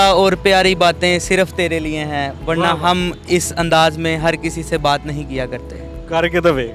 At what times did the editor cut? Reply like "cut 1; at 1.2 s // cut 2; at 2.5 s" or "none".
none